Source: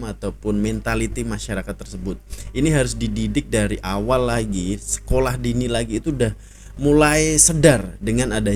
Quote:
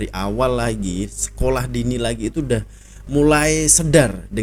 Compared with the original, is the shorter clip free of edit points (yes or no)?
yes